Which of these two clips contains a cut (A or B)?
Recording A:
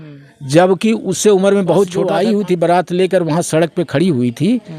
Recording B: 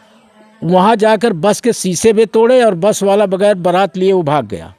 A